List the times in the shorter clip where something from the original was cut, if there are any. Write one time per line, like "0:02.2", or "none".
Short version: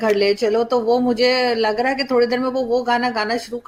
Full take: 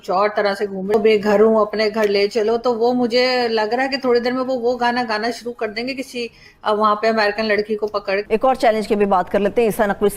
none